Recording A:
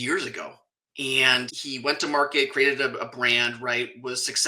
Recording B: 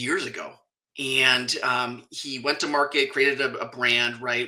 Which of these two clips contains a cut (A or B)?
A